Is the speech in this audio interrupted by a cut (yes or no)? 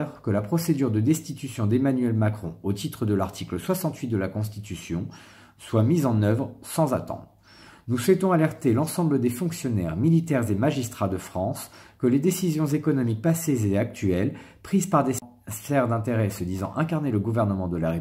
yes